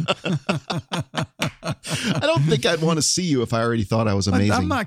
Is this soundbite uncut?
yes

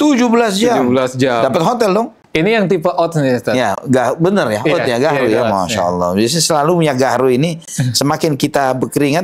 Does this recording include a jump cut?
yes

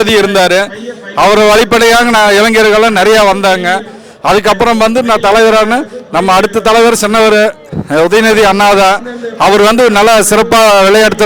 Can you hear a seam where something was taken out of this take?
no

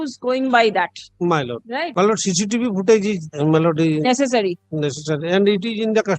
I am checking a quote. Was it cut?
yes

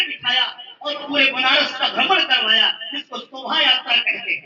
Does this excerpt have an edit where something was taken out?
no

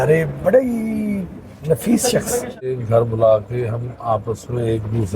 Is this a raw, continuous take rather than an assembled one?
no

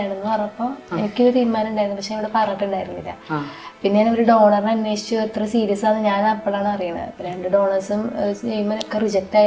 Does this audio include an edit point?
no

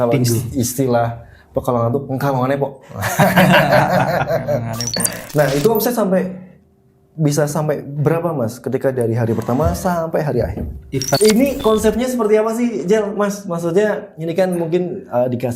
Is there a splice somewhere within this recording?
yes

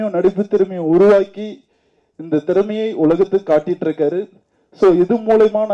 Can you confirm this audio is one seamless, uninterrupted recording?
yes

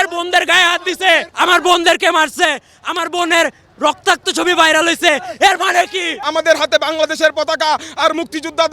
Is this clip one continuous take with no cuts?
no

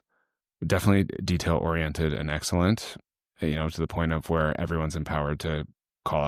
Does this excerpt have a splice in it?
no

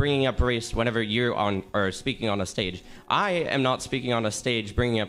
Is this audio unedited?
yes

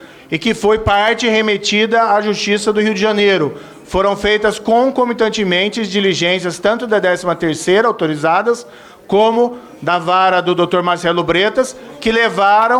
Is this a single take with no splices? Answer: yes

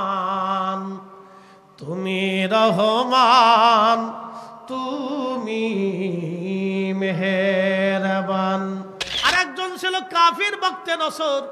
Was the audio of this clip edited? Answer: yes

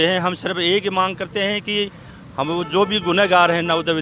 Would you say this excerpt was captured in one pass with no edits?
yes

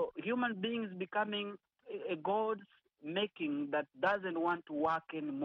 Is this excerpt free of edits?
no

